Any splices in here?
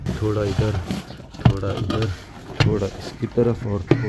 no; 0 cuts

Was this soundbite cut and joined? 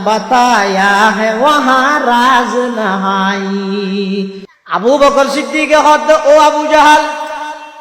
yes; 1 cut; at 4.4 s

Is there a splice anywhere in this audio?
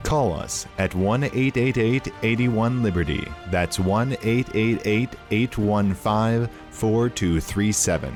no; 0 cuts

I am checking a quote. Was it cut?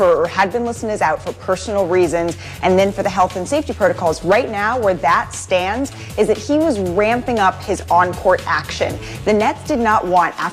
no; 0 cuts

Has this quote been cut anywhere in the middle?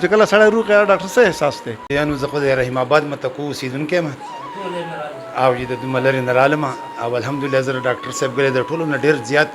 yes; 1 cut; at 2.2 s

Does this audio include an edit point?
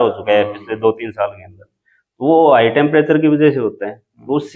no; 0 cuts

